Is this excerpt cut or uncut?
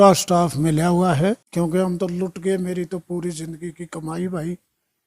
cut